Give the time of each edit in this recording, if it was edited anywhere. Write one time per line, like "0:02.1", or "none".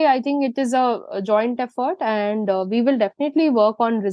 none